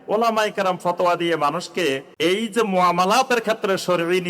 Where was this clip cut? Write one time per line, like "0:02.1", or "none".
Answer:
0:02.1